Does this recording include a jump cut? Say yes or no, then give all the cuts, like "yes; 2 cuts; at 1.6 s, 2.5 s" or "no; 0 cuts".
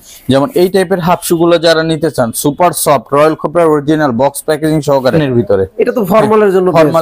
yes; 1 cut; at 5.2 s